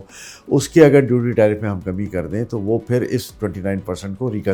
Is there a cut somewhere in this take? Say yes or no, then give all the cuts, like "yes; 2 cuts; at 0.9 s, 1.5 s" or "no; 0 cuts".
no; 0 cuts